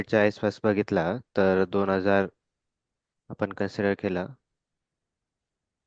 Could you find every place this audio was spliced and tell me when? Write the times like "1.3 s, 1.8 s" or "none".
none